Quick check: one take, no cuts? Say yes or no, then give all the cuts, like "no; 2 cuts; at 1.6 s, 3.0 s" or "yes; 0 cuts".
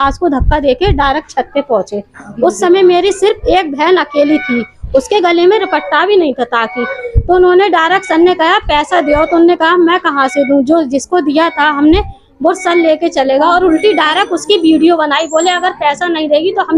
yes; 0 cuts